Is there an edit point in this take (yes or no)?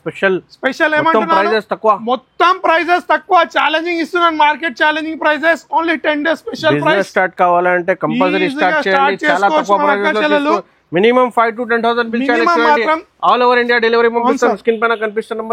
no